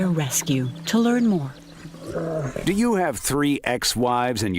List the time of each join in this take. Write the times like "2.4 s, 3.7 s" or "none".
2.6 s